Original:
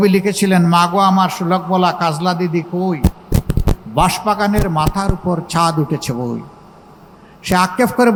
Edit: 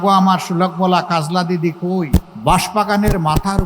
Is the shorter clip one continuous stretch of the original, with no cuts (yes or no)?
no